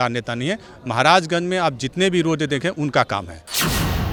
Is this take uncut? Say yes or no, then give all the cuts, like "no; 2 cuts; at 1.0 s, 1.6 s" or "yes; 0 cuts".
yes; 0 cuts